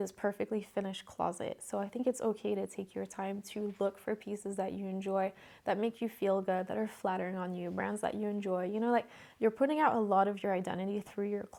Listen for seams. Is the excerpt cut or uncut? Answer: uncut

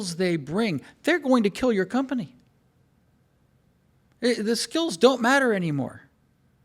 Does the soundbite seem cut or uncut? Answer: uncut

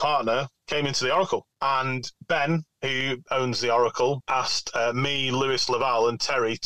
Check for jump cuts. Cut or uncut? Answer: cut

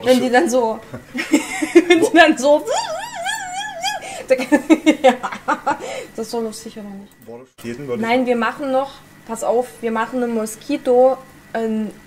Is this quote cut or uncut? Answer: cut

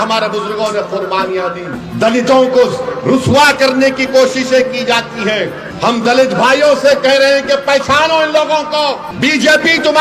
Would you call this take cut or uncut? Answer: cut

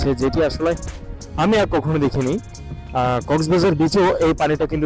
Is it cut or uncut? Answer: uncut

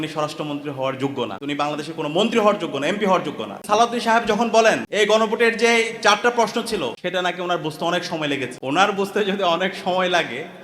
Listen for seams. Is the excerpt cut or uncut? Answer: cut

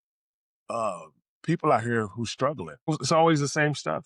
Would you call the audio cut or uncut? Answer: cut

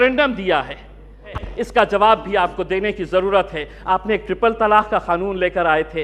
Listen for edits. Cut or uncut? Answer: cut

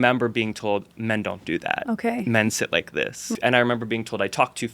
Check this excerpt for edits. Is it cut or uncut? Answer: cut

